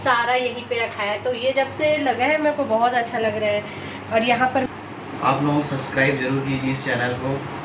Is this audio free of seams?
no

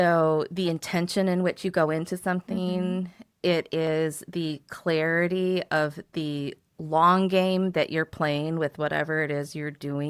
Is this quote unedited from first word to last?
yes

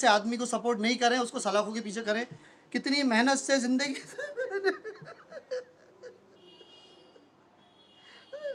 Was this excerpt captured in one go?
yes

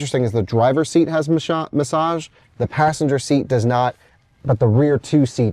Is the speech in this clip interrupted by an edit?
no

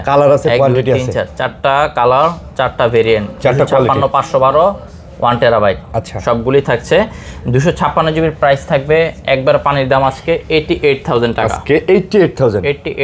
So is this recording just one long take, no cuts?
yes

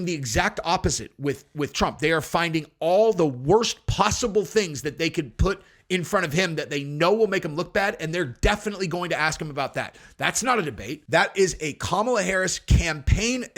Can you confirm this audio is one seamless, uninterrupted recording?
no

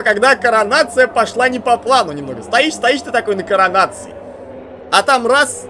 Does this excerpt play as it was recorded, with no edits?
yes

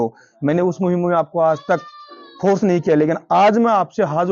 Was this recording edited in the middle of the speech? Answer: no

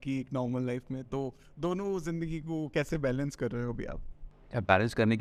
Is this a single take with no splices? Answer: yes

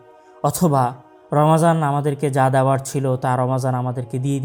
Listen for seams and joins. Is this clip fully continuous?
yes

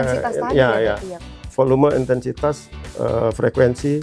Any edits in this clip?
yes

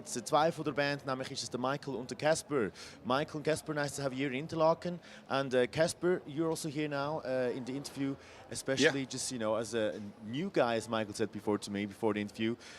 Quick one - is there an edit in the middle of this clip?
yes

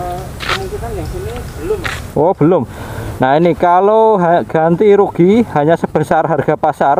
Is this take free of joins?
yes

